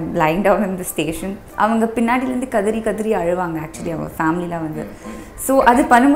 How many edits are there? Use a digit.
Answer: 1